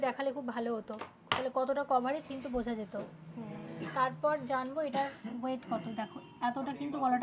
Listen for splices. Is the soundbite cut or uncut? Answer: uncut